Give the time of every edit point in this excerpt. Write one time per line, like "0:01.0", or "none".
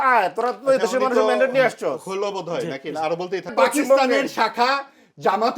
0:03.5